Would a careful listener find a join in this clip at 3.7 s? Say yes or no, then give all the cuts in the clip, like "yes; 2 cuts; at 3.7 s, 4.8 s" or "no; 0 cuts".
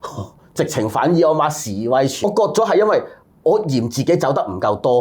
no; 1 cut; at 2.2 s